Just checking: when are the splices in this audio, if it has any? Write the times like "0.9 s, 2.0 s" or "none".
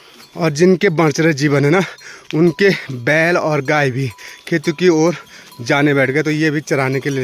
none